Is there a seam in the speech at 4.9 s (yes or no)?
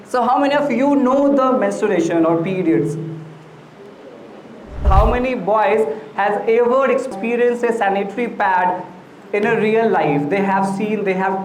yes